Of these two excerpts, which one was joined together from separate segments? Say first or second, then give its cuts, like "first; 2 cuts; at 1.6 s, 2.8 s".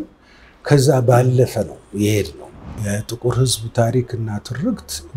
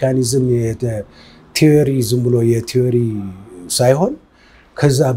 first; 1 cut; at 2.8 s